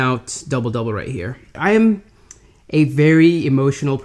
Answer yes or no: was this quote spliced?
yes